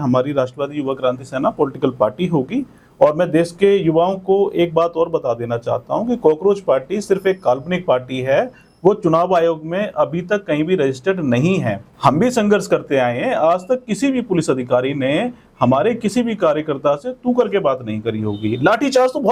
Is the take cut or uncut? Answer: uncut